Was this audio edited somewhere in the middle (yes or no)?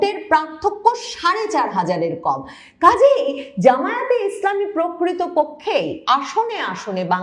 no